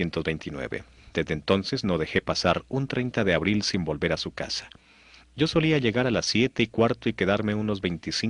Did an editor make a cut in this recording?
no; 0 cuts

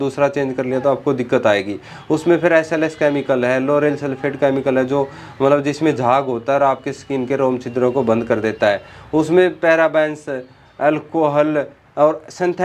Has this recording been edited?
no; 0 cuts

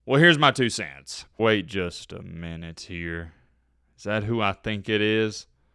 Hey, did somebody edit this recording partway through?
yes; 1 cut; at 1.3 s

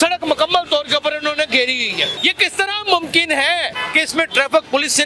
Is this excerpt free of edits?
no; 2 cuts; at 2.1 s, 3.8 s

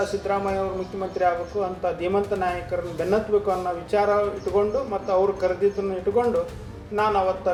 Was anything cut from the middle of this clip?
no; 0 cuts

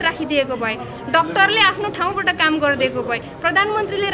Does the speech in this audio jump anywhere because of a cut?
no; 0 cuts

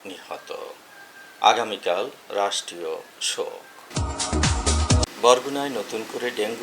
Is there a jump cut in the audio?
no; 0 cuts

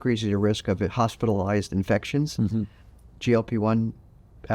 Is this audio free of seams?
yes; 0 cuts

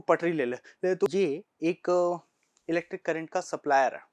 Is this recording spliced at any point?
yes; 1 cut; at 1.1 s

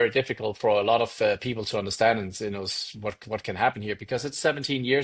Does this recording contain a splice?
no; 0 cuts

